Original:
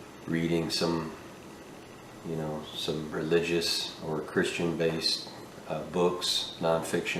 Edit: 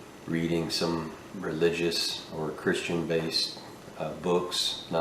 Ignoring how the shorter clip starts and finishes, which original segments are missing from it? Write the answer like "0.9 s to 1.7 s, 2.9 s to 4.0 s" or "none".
1.4 s to 3.1 s